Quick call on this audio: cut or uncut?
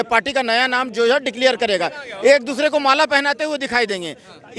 uncut